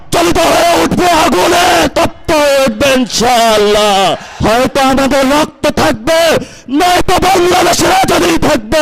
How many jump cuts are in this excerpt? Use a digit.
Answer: 1